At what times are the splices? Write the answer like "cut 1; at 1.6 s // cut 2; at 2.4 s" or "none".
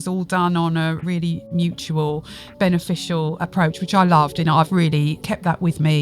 cut 1; at 1.0 s // cut 2; at 3.4 s // cut 3; at 4.8 s